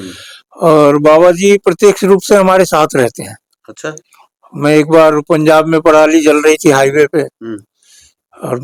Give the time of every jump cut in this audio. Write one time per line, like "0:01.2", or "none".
none